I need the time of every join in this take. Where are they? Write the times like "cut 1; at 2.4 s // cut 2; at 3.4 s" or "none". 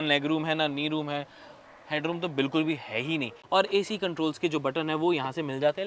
cut 1; at 3.3 s